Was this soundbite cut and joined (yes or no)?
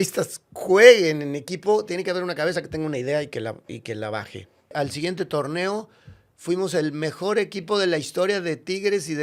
yes